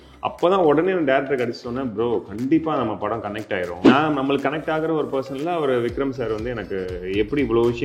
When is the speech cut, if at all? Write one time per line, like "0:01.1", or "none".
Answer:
0:03.9